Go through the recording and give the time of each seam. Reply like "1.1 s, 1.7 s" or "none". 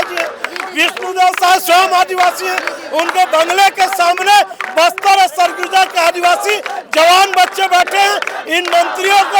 none